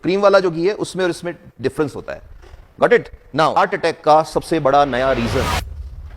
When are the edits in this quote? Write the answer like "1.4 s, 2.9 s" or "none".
3.5 s